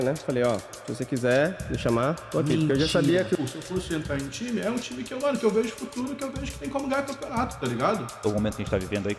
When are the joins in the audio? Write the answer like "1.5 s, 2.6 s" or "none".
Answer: 3.4 s, 8.1 s